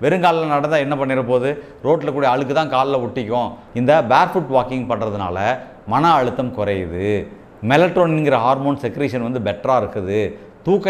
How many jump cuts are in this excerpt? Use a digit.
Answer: 1